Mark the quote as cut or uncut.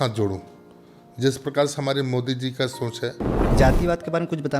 cut